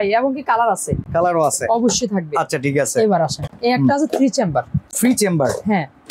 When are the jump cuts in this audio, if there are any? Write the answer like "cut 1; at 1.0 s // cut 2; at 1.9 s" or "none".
none